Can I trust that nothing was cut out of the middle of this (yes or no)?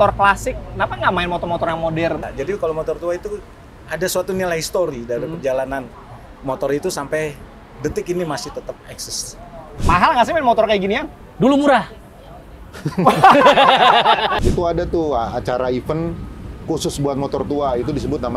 no